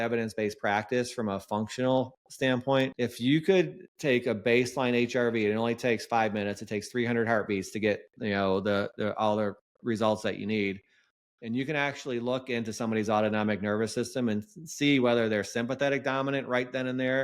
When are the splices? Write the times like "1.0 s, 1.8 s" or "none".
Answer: 2.9 s, 3.8 s